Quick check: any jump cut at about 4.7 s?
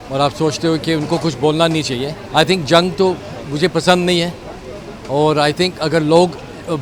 no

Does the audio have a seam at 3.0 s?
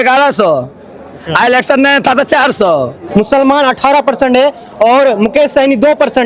yes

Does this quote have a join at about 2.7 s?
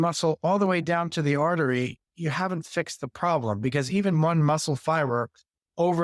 no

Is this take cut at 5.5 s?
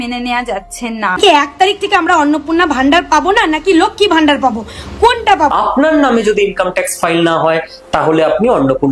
yes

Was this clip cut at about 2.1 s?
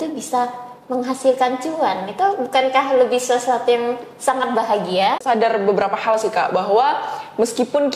no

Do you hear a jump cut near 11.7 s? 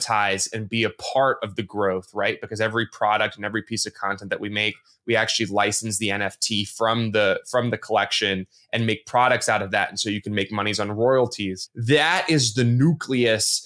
yes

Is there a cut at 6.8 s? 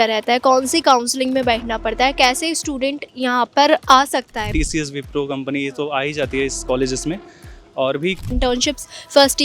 no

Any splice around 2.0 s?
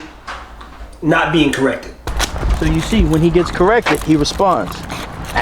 yes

